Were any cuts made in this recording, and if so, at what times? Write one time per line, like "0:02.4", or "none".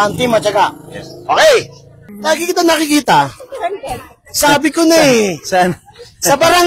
0:02.0

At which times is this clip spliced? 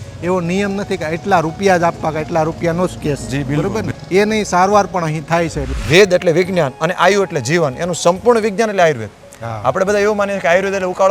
0:04.0
0:05.7

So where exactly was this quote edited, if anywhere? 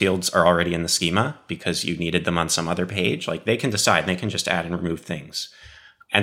none

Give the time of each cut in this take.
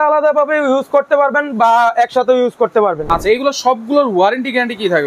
0:03.1

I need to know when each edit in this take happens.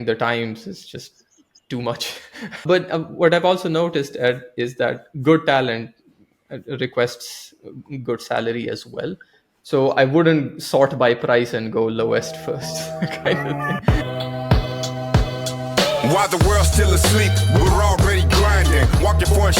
0:02.6
0:13.6

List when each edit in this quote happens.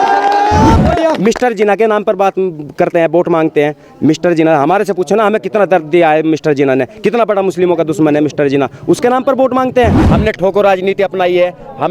0:10.1

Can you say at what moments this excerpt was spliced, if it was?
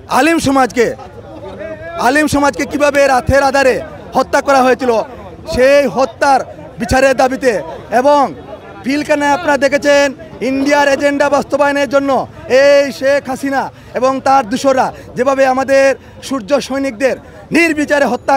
none

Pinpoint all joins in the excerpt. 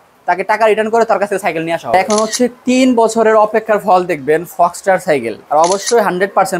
0:01.9
0:05.4

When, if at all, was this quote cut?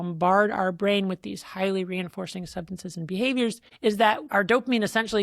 0:04.0

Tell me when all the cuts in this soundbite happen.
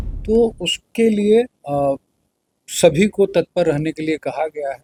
none

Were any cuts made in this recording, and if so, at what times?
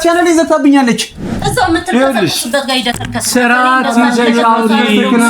0:01.3

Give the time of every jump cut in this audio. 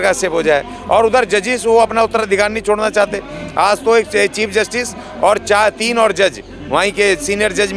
none

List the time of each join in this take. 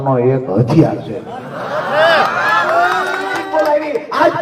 0:03.4

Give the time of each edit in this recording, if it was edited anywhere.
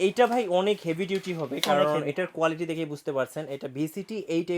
none

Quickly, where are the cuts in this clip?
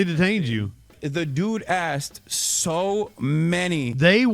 0:01.0

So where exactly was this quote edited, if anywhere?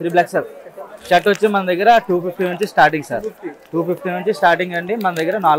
none

